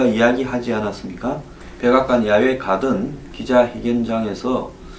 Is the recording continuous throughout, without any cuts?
no; 1 cut; at 1.9 s

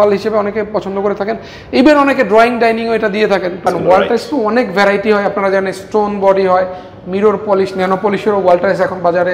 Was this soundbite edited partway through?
yes; 1 cut; at 3.7 s

